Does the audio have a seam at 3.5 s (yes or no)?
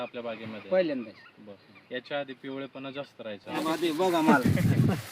yes